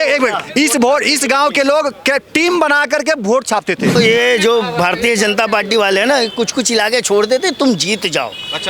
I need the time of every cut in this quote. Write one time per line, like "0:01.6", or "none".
0:03.9